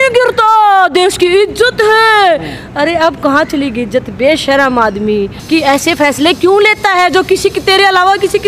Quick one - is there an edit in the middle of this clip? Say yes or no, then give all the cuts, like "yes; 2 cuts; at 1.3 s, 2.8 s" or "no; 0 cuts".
yes; 1 cut; at 5.3 s